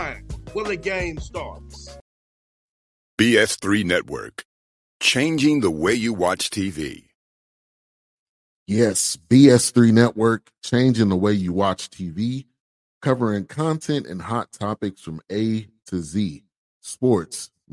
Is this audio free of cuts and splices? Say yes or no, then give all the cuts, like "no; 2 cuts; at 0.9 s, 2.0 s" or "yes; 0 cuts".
no; 1 cut; at 2.0 s